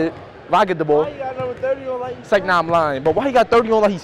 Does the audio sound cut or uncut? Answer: uncut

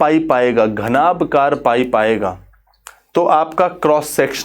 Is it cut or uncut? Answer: uncut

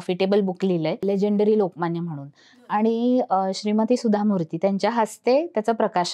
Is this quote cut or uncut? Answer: uncut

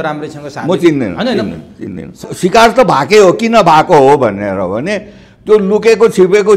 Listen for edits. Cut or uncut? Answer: cut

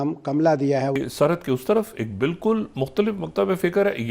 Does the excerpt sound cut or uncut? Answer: cut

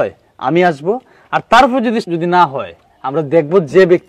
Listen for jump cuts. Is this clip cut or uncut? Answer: cut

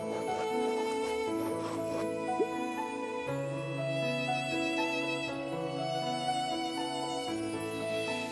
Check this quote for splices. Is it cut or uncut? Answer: uncut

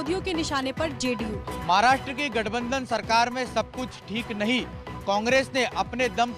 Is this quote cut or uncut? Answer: cut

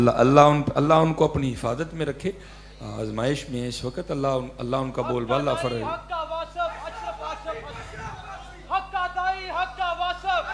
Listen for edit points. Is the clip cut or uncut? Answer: uncut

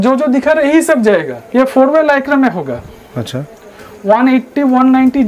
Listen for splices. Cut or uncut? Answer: cut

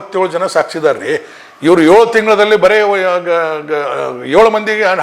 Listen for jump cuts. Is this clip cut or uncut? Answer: uncut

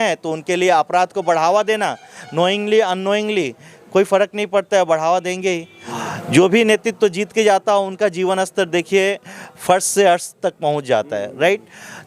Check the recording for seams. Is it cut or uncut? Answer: cut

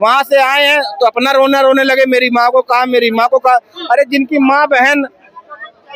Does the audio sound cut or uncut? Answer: uncut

